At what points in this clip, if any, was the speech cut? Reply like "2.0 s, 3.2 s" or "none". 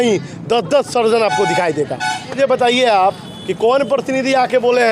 2.2 s